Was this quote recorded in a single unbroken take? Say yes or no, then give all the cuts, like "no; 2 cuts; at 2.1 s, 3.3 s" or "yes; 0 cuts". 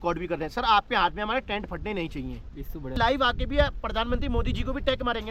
no; 1 cut; at 3.0 s